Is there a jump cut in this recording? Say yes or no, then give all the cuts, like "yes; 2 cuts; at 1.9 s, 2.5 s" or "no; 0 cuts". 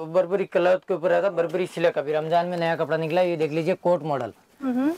no; 0 cuts